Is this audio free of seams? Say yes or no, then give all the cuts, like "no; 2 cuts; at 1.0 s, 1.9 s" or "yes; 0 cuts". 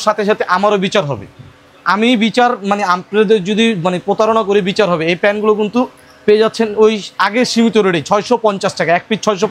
yes; 0 cuts